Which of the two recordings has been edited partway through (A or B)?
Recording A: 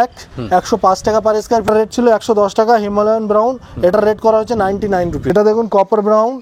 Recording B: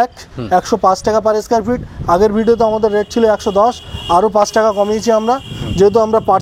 A